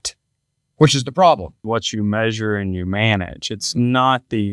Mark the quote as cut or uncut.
cut